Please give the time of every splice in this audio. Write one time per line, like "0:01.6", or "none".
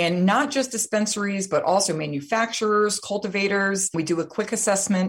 0:03.9